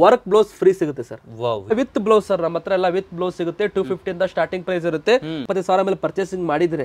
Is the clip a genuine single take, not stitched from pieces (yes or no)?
no